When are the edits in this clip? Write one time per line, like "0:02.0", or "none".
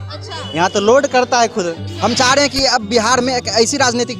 0:01.9

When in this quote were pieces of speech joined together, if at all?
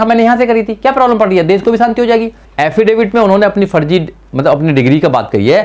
0:02.4

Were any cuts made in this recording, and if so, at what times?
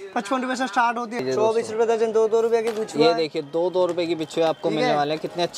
0:01.2

